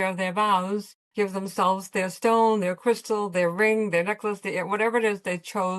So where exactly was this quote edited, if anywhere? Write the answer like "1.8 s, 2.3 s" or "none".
1.0 s

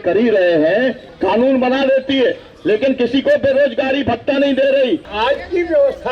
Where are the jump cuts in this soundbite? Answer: 1.1 s, 5.1 s

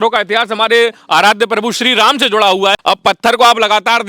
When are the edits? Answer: 2.8 s

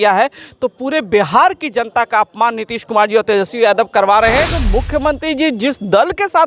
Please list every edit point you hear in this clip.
4.6 s

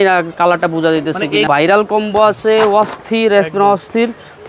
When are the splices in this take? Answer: 1.5 s

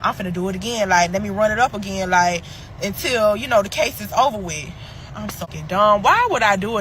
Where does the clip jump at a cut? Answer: 5.5 s

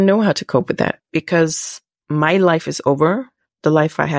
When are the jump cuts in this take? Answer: 1.0 s

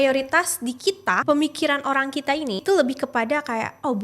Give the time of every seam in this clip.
1.2 s, 2.6 s

